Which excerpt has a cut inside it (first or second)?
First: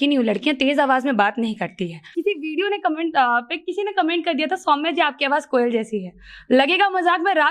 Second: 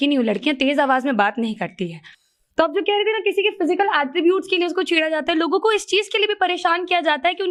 first